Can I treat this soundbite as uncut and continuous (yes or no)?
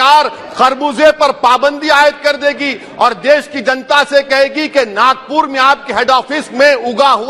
yes